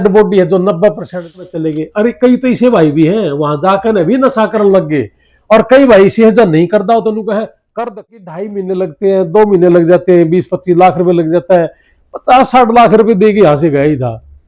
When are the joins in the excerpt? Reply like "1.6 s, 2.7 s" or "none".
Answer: 1.3 s, 8.1 s